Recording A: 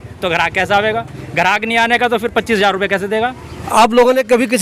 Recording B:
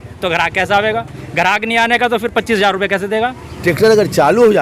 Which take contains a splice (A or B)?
B